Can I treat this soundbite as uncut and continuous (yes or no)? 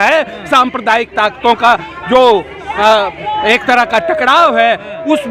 yes